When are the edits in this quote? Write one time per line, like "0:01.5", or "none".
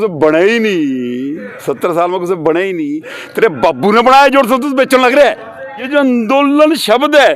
0:05.8